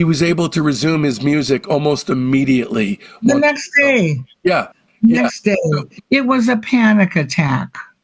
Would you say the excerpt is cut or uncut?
uncut